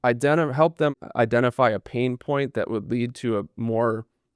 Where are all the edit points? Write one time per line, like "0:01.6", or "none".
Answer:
0:00.9